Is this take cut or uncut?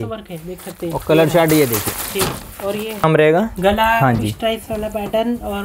cut